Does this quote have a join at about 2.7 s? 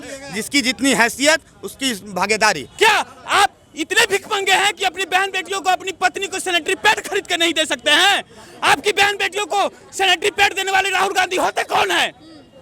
yes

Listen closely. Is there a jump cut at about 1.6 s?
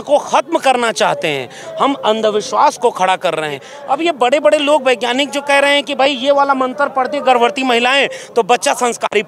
no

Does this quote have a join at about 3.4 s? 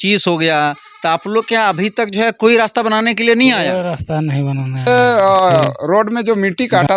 no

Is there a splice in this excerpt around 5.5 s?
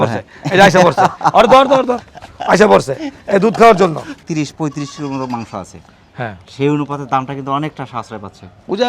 no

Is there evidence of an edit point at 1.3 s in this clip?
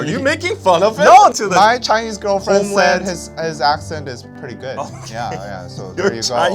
yes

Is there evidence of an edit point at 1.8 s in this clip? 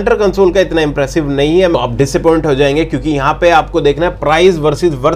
yes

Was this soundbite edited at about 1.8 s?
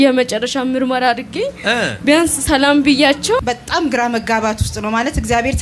no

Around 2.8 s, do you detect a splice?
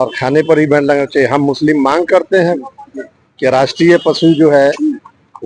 no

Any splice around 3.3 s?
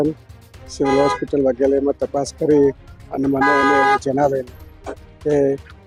no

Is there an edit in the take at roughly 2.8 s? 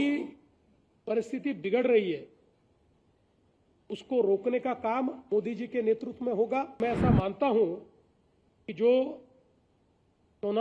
no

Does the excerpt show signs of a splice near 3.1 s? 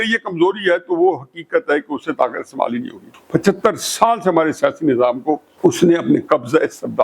yes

